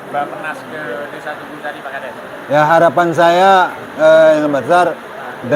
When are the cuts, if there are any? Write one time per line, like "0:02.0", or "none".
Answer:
none